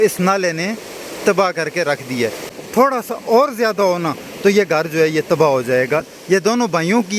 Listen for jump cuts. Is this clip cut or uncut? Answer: cut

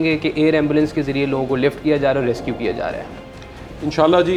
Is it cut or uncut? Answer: uncut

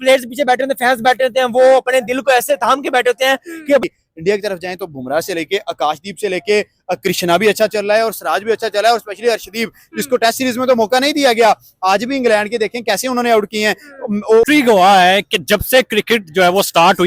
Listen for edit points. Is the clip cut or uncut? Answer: cut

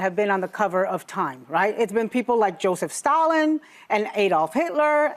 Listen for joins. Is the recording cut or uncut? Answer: uncut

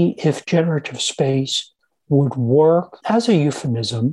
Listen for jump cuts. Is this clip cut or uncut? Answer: cut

